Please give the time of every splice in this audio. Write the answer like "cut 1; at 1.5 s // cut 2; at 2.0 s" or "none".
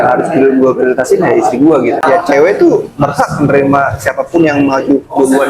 cut 1; at 2.0 s